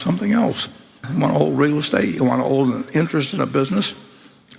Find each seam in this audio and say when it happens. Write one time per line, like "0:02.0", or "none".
0:01.0